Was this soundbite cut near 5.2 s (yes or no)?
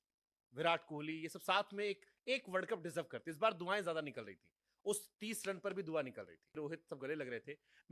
no